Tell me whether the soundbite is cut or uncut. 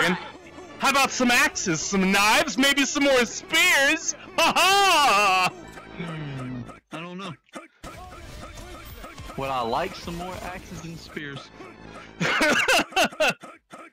uncut